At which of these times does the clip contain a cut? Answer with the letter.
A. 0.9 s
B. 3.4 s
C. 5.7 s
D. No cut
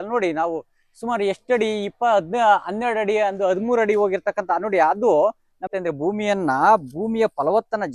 C